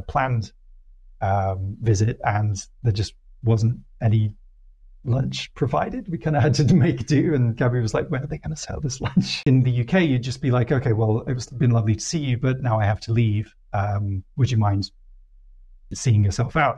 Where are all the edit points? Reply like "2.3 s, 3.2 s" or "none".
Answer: 9.4 s